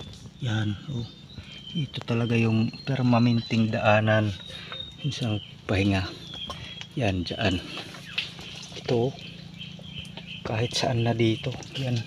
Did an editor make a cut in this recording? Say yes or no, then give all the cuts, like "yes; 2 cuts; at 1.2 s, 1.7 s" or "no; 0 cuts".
no; 0 cuts